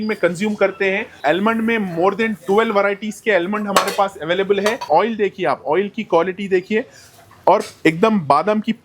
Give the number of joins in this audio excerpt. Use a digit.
2